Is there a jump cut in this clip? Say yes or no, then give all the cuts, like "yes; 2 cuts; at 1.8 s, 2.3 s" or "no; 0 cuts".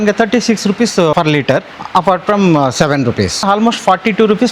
yes; 2 cuts; at 1.3 s, 3.5 s